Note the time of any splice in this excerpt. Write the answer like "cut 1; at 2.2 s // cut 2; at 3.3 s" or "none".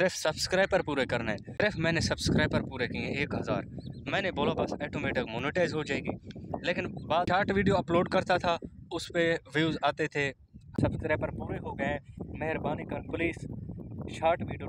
cut 1; at 1.4 s // cut 2; at 7.3 s // cut 3; at 10.6 s

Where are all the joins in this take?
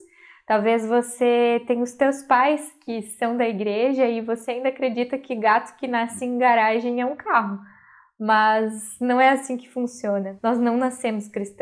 cut 1; at 10.3 s

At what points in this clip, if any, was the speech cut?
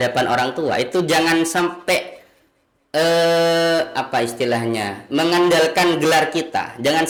none

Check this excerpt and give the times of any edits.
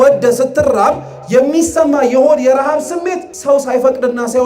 cut 1; at 3.3 s

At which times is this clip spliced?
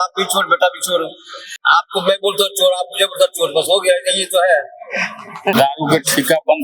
cut 1; at 1.5 s // cut 2; at 5.5 s

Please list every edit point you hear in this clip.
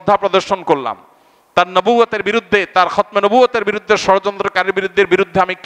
none

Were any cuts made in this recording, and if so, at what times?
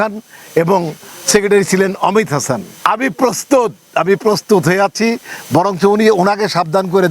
cut 1; at 2.7 s

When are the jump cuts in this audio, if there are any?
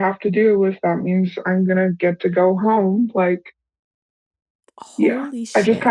none

